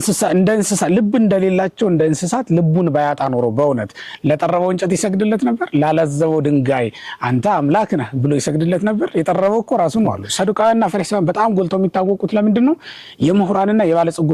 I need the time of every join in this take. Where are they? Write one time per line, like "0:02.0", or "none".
0:10.2